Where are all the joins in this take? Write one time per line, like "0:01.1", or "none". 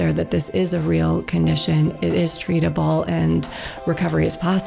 none

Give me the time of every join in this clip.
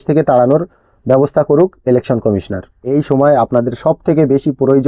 0:02.8

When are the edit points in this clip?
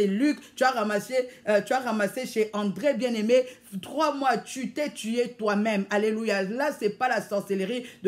none

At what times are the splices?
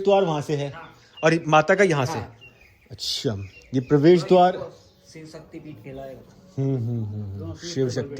none

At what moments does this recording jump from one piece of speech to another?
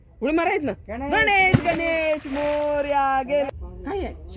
0:03.5

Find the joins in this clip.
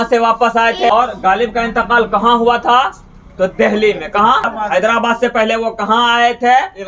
0:00.9
0:04.4

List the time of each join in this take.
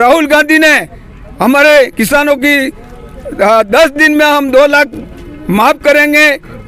none

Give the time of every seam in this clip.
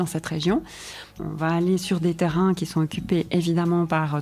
0:01.1

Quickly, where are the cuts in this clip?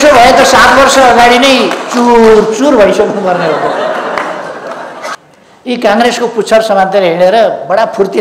0:05.1

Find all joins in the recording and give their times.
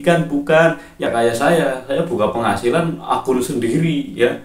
0:01.1

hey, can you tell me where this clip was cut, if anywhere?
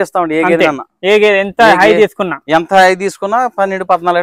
none

